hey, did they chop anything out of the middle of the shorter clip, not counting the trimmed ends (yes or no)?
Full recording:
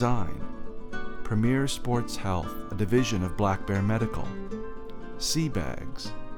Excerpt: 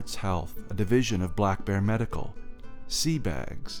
yes